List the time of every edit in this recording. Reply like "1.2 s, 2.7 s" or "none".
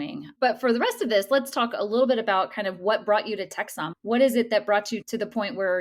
none

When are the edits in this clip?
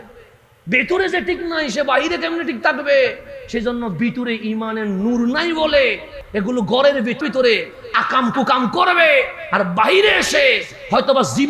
7.2 s

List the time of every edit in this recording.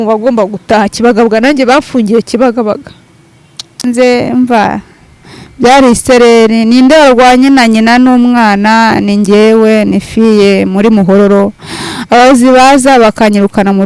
3.8 s

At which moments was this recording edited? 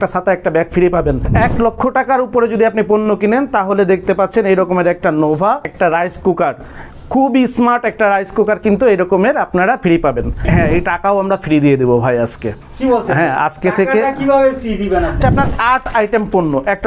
1.3 s, 5.7 s, 10.4 s, 15.2 s

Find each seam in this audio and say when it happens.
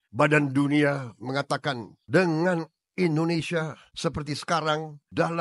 none

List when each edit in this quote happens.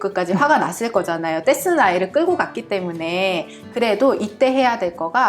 none

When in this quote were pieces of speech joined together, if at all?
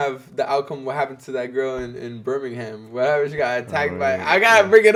none

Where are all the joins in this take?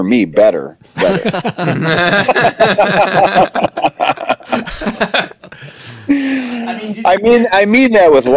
none

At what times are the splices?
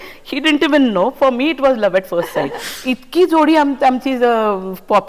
2.7 s

